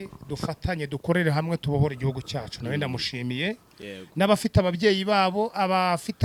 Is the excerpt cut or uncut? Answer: uncut